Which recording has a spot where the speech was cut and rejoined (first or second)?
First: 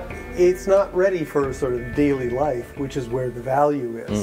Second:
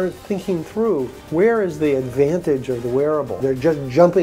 second